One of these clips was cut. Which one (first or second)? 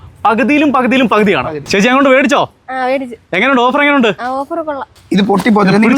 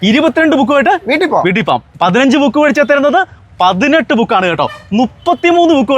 first